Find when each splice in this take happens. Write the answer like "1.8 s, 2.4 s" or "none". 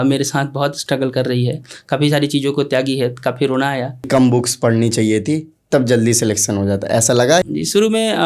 4.1 s, 7.4 s